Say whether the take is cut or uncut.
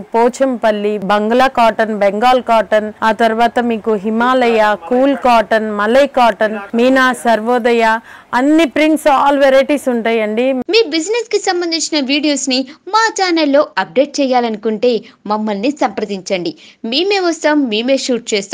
cut